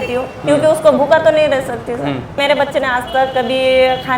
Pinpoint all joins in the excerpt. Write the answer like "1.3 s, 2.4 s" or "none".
2.4 s